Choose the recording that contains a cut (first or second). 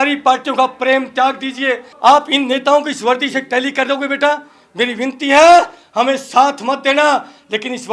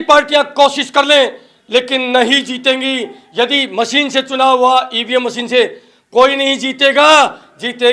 first